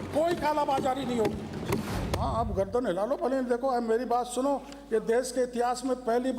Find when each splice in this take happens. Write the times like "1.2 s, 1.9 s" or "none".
2.0 s